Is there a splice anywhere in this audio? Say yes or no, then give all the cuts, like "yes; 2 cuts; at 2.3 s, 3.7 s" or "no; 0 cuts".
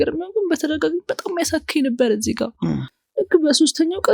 yes; 1 cut; at 3.0 s